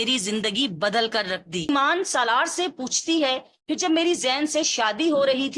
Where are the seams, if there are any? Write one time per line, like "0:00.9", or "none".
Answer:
0:01.7